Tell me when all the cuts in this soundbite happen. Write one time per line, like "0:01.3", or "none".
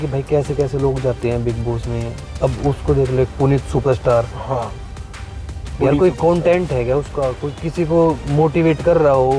none